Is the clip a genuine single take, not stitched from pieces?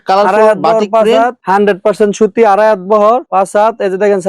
no; 1 cut; at 1.4 s

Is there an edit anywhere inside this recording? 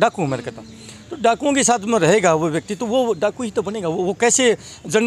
no; 0 cuts

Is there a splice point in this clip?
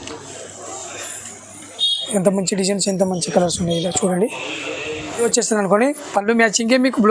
yes; 1 cut; at 5.2 s

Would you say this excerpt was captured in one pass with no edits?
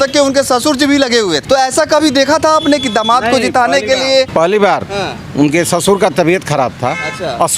no; 2 cuts; at 1.4 s, 4.3 s

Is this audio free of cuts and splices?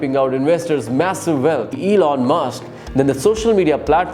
no; 1 cut; at 1.8 s

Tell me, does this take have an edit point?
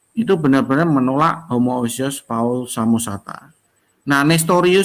no; 0 cuts

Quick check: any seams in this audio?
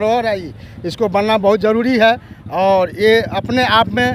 no; 0 cuts

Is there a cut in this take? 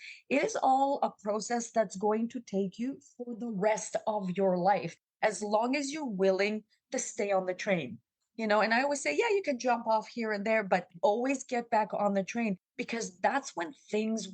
yes; 1 cut; at 12.7 s

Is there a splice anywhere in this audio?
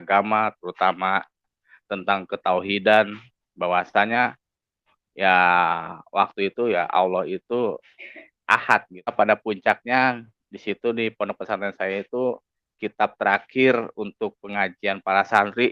yes; 1 cut; at 9.1 s

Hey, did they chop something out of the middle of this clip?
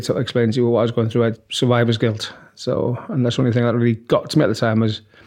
yes; 1 cut; at 1.4 s

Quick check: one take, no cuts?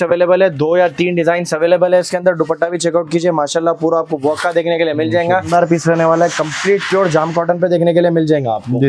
no; 1 cut; at 5.5 s

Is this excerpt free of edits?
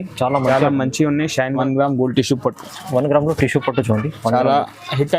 no; 1 cut; at 1.5 s

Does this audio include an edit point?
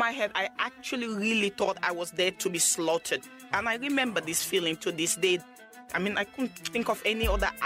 yes; 2 cuts; at 3.3 s, 5.9 s

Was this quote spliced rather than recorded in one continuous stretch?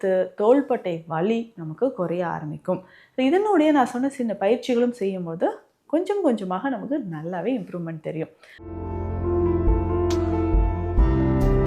yes; 1 cut; at 8.5 s

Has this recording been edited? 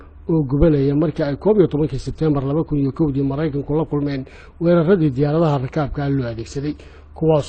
no; 0 cuts

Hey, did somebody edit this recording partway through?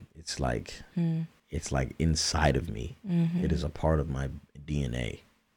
yes; 1 cut; at 1.4 s

